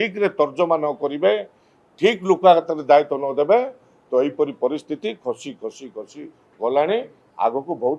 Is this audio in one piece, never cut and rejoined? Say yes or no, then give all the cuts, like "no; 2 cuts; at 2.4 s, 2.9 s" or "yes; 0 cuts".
yes; 0 cuts